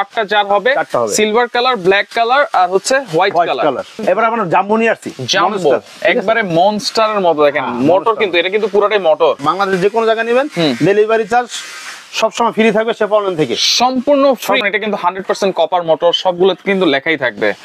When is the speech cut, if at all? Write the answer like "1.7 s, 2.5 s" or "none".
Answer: 3.9 s, 9.4 s, 14.6 s